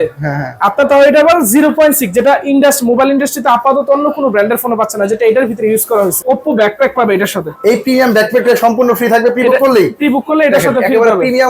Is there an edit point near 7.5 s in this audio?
no; 1 cut; at 6.2 s

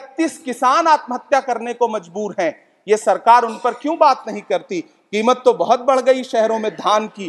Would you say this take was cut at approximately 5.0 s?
no; 0 cuts

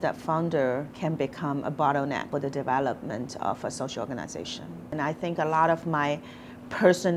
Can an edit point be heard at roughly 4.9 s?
yes; 3 cuts; at 0.9 s, 2.3 s, 4.9 s

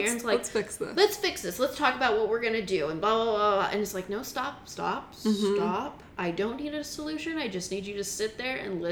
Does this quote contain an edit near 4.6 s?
no; 0 cuts

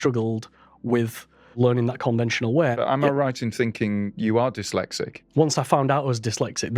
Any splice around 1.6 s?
yes; 4 cuts; at 1.6 s, 2.8 s, 4.1 s, 5.1 s

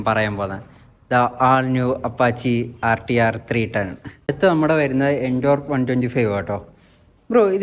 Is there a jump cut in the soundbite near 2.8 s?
no; 1 cut; at 4.0 s

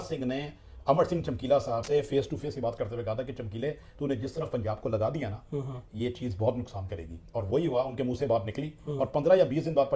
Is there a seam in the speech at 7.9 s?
no; 1 cut; at 1.8 s

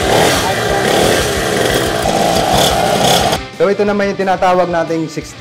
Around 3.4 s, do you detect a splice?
yes; 2 cuts; at 2.0 s, 3.4 s

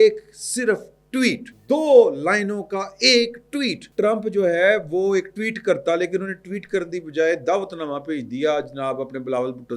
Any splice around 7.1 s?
no; 2 cuts; at 1.5 s, 3.8 s

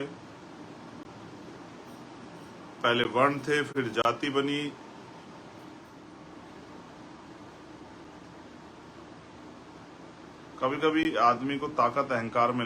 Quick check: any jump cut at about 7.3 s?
no; 1 cut; at 6.1 s

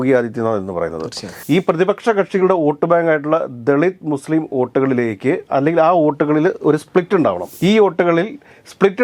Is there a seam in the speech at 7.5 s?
yes; 2 cuts; at 1.4 s, 7.5 s

